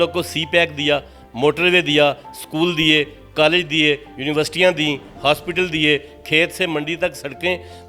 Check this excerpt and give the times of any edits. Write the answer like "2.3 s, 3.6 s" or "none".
none